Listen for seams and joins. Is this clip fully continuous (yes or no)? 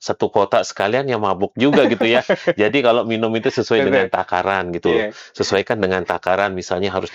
yes